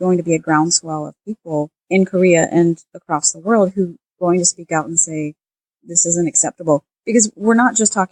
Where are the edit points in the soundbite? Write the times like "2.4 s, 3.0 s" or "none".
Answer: 1.8 s, 4.0 s